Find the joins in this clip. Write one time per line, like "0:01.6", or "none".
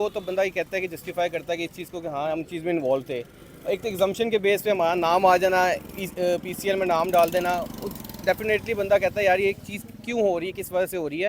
none